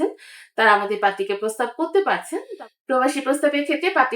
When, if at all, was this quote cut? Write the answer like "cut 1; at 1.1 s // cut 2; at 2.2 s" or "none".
cut 1; at 2.4 s